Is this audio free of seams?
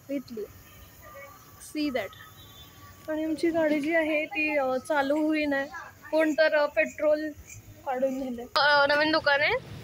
no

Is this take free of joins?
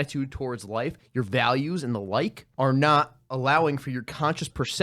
no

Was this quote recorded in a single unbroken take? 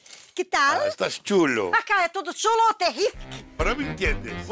yes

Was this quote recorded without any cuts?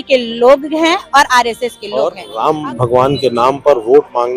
no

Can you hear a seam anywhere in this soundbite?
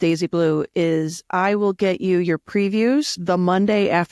yes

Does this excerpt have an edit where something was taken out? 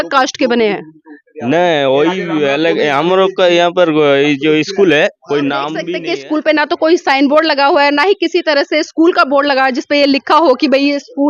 yes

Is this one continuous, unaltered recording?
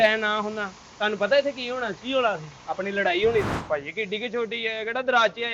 no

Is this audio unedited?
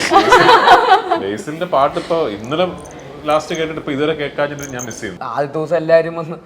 no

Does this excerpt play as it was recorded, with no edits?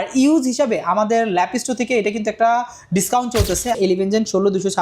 no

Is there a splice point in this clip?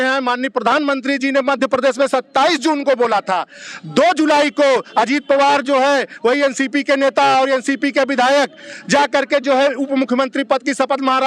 no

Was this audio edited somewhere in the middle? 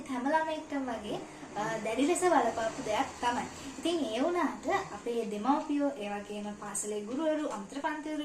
no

